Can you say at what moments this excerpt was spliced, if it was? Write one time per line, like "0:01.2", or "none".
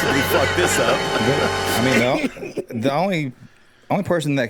none